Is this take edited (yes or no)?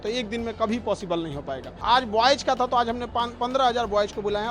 yes